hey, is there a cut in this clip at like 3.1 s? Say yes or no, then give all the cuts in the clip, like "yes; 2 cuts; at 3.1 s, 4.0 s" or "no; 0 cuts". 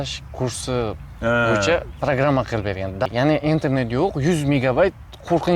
yes; 1 cut; at 3.1 s